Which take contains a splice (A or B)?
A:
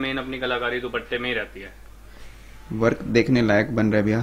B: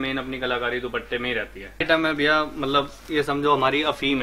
B